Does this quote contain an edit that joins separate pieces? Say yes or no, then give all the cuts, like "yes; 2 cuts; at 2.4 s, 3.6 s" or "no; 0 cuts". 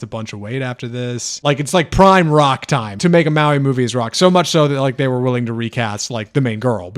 yes; 2 cuts; at 1.4 s, 2.9 s